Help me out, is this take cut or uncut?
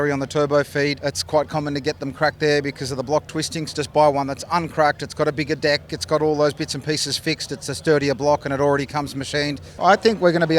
cut